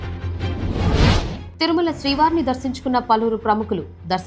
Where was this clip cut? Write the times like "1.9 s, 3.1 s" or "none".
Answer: 1.4 s